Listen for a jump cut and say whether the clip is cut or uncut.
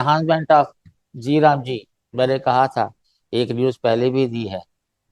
uncut